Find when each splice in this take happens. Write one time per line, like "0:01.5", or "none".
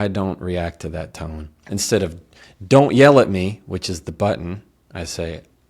0:01.5

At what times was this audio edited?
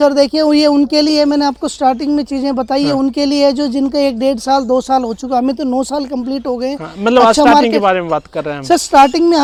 none

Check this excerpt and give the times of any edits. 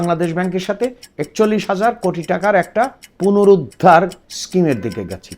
0:03.0

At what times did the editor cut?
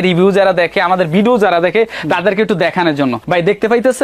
none

